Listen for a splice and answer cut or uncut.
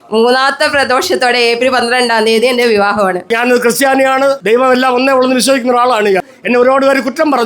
cut